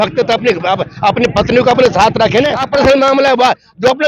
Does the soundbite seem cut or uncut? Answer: cut